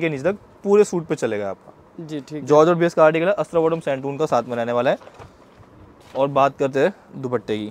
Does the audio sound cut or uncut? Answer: uncut